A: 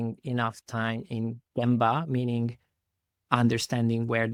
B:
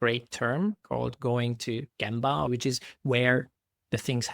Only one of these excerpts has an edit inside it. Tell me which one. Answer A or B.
B